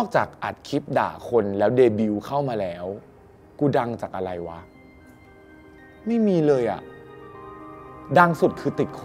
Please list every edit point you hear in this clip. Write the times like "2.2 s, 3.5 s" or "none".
none